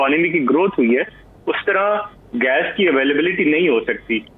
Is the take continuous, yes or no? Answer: yes